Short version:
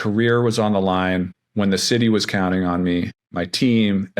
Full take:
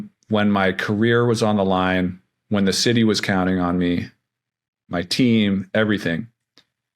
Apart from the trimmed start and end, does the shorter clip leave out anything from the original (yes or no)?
yes